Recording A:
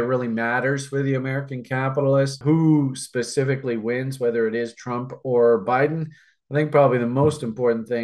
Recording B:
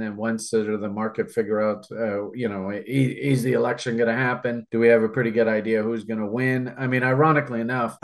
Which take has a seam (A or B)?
B